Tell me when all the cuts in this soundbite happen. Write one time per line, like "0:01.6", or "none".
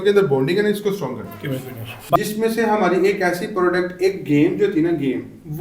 0:02.2